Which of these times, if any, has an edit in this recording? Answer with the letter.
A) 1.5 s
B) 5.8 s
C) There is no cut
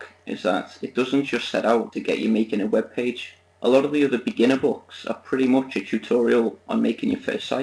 A